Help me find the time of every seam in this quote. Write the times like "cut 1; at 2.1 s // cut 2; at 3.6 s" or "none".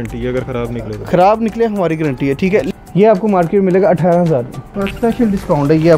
cut 1; at 2.7 s // cut 2; at 4.8 s